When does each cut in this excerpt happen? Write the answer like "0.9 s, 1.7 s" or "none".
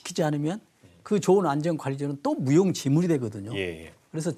none